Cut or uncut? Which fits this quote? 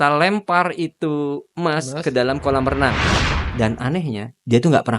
cut